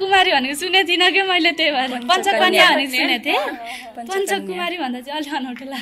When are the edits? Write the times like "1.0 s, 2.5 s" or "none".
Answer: none